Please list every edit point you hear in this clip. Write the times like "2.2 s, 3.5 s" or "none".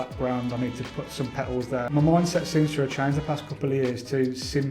1.9 s